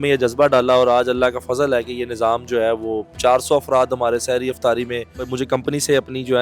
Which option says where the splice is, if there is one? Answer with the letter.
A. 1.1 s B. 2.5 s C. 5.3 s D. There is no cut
C